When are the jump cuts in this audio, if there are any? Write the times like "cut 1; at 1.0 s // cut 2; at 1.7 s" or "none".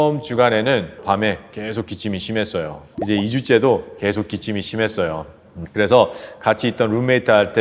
cut 1; at 1.0 s

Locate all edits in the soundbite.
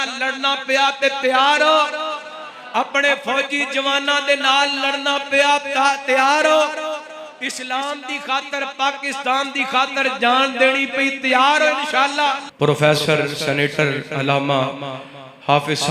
cut 1; at 12.5 s

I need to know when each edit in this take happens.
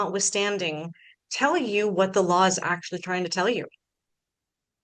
none

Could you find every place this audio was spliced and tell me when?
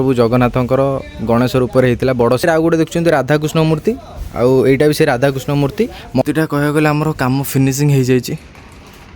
cut 1; at 2.4 s // cut 2; at 6.2 s

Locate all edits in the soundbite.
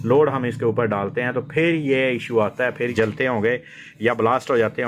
cut 1; at 2.9 s

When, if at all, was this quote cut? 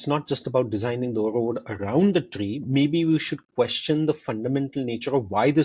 none

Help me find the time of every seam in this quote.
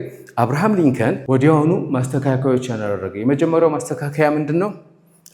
cut 1; at 1.2 s

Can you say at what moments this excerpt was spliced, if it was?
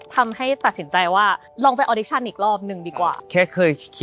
cut 1; at 1.5 s // cut 2; at 3.2 s

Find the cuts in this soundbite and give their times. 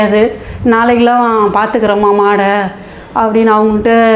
none

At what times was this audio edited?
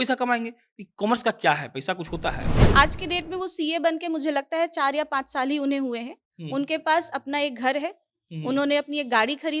cut 1; at 2.5 s

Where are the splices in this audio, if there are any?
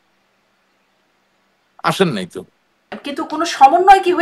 cut 1; at 3.0 s

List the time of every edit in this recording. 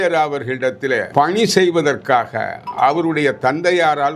cut 1; at 1.1 s

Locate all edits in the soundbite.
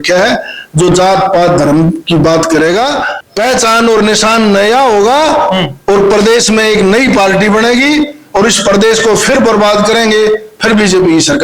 cut 1; at 3.1 s

